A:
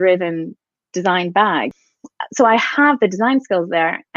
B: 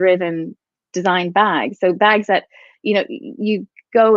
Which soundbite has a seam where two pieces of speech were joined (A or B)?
A